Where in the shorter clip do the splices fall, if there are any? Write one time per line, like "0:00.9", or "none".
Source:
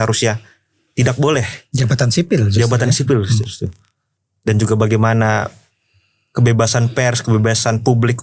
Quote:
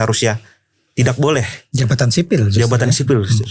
none